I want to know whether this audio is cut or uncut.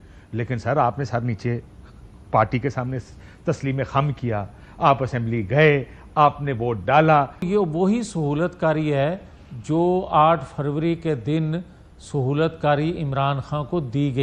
cut